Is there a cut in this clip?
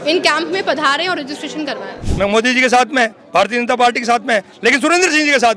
yes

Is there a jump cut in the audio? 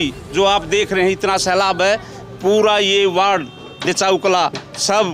no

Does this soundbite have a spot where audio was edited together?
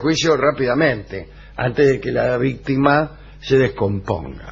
no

